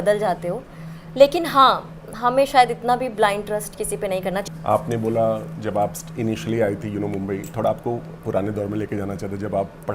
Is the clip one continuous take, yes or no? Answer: yes